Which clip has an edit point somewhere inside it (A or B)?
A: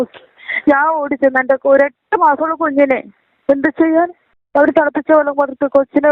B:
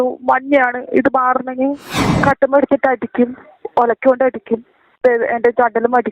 B